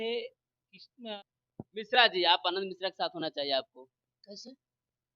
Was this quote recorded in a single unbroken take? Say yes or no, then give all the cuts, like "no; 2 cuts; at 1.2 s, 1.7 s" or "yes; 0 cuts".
no; 1 cut; at 1.1 s